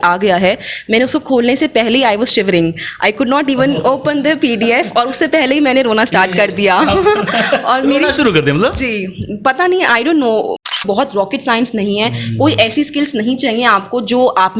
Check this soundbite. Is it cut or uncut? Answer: cut